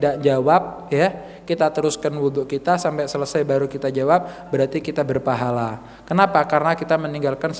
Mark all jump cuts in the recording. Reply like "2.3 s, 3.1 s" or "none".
none